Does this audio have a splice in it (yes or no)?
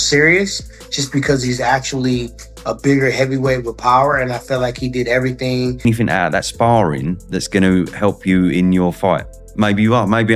yes